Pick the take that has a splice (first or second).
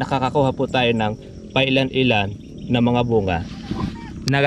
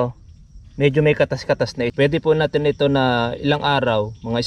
second